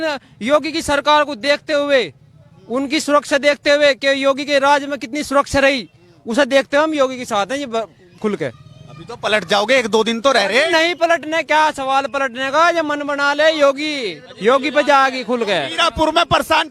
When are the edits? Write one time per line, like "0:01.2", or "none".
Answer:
none